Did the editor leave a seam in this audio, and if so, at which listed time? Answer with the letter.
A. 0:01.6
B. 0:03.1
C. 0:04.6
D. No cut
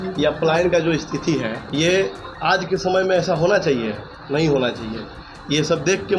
A